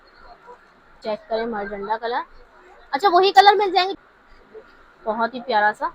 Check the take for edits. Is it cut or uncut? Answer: cut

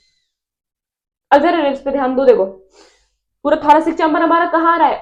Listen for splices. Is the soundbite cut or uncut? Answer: uncut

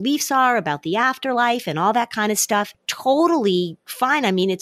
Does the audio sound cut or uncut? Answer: uncut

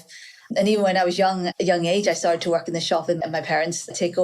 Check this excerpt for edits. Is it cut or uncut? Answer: cut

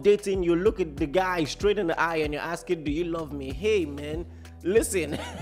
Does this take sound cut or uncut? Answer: uncut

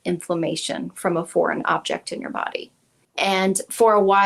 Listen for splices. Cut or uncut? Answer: cut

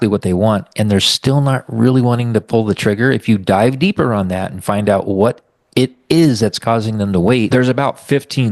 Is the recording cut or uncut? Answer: cut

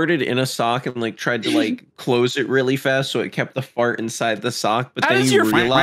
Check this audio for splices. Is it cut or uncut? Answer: uncut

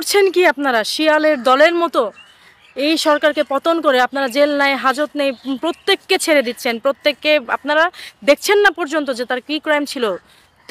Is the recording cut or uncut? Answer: uncut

